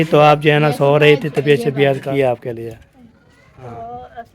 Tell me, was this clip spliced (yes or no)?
yes